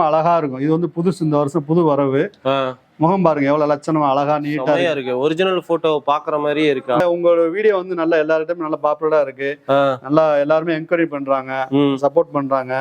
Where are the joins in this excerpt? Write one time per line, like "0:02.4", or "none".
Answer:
0:07.0